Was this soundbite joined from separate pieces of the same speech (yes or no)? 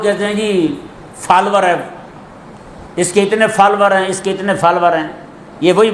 no